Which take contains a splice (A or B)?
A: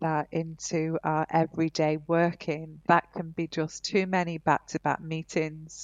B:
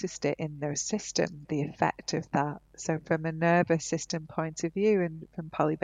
A